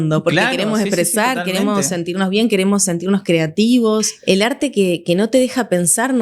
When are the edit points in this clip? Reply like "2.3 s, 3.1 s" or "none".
4.1 s